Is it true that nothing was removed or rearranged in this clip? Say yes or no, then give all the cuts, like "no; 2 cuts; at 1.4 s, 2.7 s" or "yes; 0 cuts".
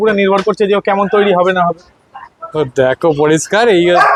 yes; 0 cuts